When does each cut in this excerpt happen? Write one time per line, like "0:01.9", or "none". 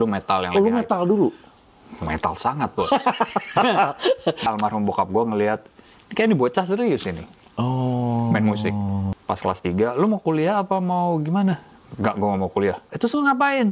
0:04.5
0:09.1
0:12.9

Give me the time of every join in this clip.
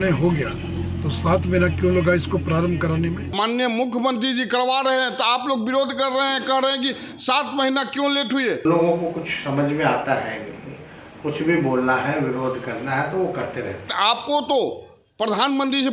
0:03.3
0:08.6
0:13.9

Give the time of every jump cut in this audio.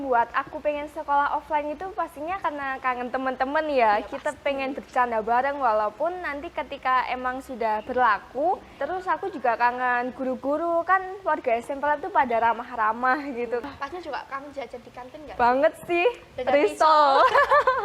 0:08.8
0:13.7

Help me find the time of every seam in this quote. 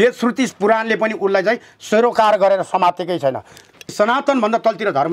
0:03.9

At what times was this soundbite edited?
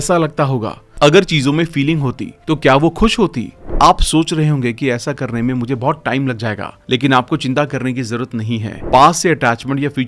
0:03.5
0:08.8

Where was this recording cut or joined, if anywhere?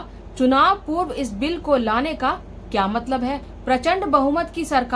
0:03.5

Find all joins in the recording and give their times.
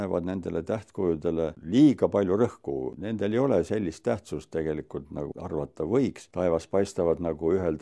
0:01.6
0:03.0
0:05.3
0:06.2

